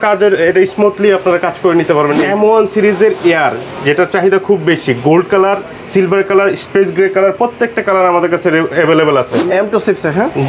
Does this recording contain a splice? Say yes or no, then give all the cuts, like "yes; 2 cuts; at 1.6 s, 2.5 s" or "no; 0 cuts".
yes; 2 cuts; at 2.3 s, 9.3 s